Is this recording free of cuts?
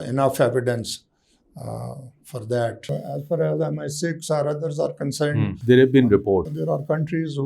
no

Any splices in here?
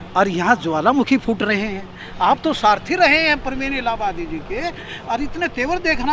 no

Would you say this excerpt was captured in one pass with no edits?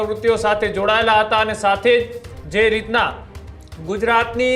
yes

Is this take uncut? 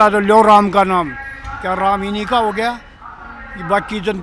yes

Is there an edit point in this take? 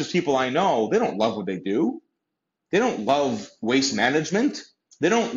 no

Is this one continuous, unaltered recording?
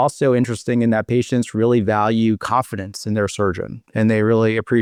yes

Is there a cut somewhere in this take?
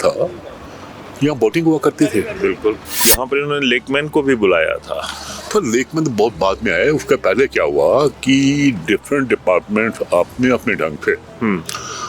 yes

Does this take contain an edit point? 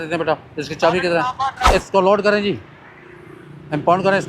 yes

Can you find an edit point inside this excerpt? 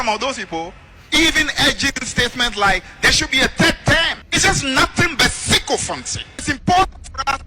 yes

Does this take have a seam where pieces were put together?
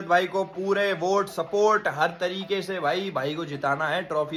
no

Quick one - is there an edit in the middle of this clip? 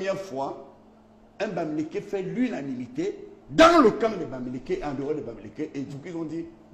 no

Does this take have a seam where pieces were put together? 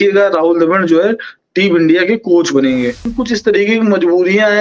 yes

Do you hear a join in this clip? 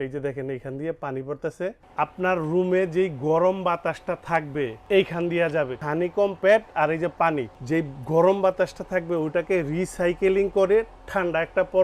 yes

